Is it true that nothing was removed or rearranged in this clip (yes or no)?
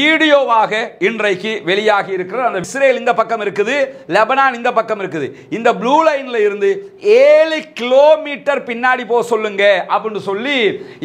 no